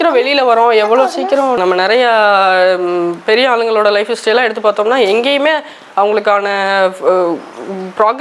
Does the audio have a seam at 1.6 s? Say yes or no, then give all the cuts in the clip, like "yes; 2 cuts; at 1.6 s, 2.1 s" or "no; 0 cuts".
yes; 1 cut; at 1.6 s